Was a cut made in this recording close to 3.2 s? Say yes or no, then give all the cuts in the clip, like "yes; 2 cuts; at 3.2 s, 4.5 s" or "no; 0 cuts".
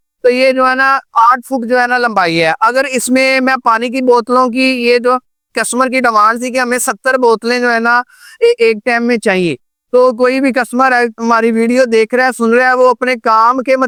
no; 0 cuts